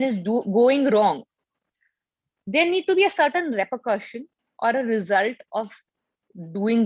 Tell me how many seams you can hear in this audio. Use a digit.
0